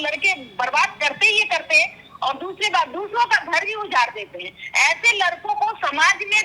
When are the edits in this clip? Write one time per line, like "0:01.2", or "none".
none